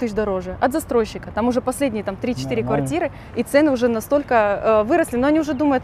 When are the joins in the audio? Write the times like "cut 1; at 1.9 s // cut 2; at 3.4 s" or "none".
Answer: none